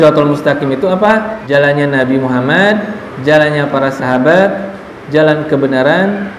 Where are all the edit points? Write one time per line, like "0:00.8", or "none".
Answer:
0:01.3